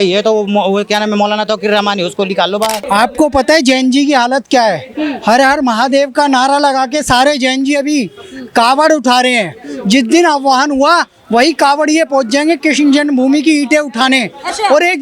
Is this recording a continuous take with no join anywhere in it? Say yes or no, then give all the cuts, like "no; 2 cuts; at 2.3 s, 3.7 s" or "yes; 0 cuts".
no; 1 cut; at 2.8 s